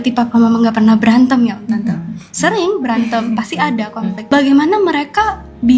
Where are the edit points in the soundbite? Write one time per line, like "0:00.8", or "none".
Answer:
0:04.2